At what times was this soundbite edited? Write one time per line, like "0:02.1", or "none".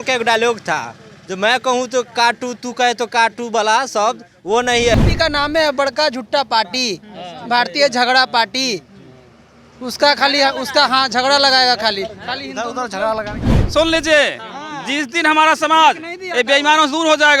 0:04.9
0:13.5